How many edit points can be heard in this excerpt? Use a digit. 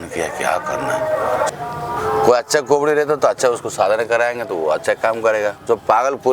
1